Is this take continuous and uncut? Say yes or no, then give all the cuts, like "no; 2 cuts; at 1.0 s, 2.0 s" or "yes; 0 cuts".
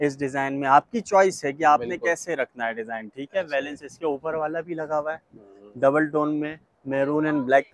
yes; 0 cuts